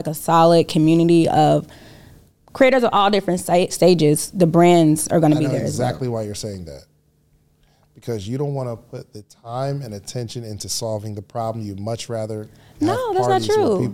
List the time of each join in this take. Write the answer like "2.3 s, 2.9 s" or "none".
none